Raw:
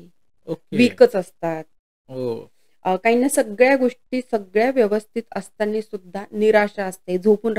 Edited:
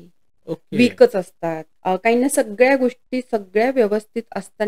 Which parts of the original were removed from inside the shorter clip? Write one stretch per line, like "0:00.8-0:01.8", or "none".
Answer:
0:01.7-0:02.7

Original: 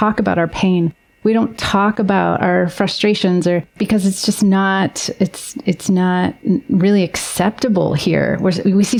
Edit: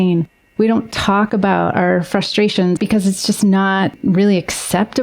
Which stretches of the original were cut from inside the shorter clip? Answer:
0:03.4-0:03.8
0:05.0-0:06.6

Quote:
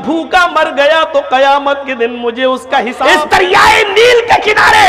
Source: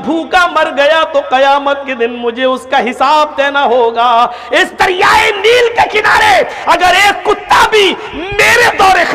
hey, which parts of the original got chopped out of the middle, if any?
0:02.9-0:04.4

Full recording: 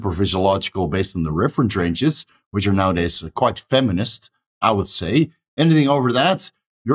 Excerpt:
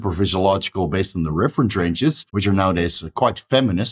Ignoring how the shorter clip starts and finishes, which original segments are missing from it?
0:02.3-0:02.5

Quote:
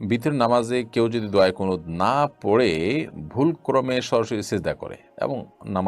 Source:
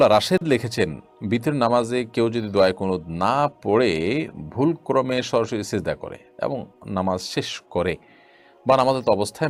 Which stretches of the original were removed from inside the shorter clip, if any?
none

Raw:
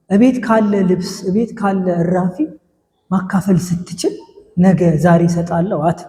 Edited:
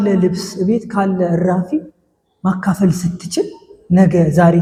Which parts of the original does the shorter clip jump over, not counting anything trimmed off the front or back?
none

